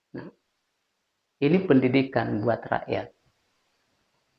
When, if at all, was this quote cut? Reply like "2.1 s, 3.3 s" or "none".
none